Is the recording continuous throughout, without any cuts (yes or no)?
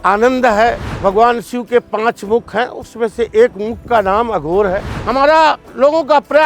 no